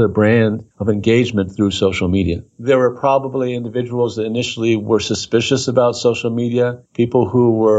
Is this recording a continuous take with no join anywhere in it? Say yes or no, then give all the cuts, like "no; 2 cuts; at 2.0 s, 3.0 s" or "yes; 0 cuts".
no; 2 cuts; at 2.5 s, 6.8 s